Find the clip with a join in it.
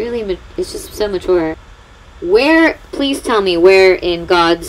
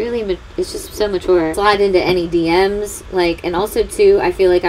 first; 1 cut; at 1.5 s

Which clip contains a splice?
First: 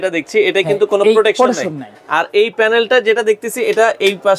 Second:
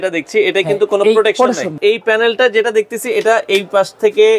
second; 1 cut; at 1.8 s

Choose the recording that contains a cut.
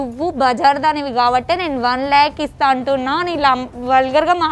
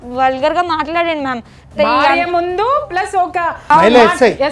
second; 1 cut; at 3.6 s

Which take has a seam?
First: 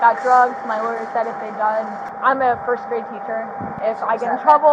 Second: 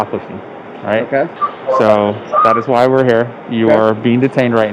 first; 2 cuts; at 2.0 s, 3.8 s

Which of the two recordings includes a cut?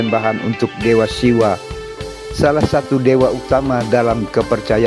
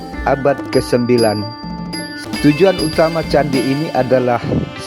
second; 1 cut; at 2.1 s

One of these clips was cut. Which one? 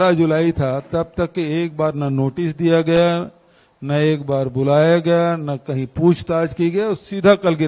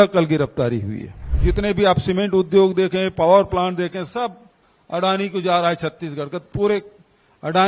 second; 1 cut; at 1.3 s

